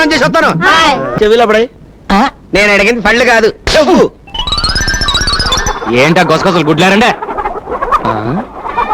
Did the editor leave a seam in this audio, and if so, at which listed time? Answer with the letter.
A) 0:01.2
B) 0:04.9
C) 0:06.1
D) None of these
A